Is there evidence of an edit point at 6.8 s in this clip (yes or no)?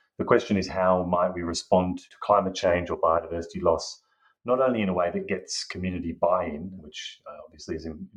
yes